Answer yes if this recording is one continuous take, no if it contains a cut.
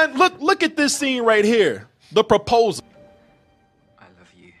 no